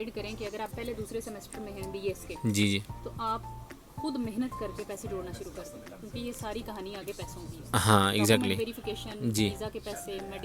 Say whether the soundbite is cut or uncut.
uncut